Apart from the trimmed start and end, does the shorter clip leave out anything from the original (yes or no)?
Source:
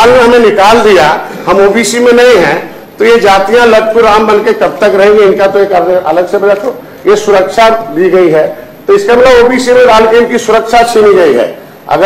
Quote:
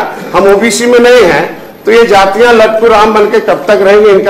no